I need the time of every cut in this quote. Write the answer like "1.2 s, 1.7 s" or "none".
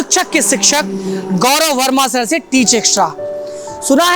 none